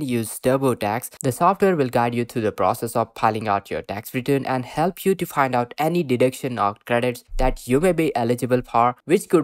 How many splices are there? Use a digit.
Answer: 1